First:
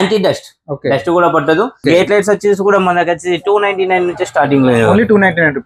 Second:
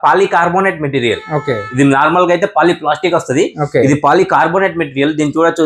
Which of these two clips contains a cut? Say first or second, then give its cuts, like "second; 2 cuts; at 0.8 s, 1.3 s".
first; 1 cut; at 1.8 s